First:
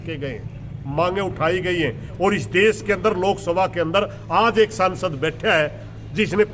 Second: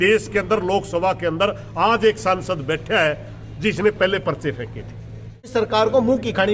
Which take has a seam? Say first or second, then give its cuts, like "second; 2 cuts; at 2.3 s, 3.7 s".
second; 1 cut; at 5.5 s